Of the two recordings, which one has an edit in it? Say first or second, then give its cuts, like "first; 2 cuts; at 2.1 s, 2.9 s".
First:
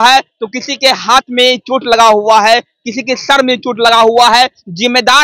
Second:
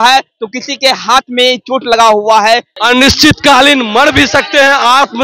second; 1 cut; at 2.7 s